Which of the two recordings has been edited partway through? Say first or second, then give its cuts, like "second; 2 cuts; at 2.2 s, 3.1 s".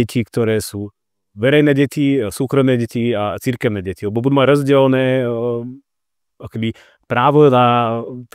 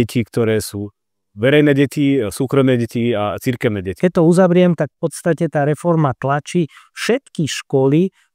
second; 1 cut; at 3.9 s